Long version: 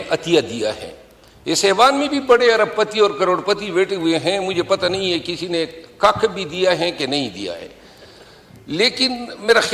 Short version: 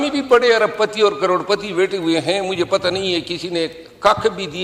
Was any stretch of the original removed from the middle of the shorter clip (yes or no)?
no